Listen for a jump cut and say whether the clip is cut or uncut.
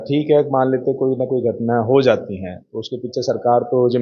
uncut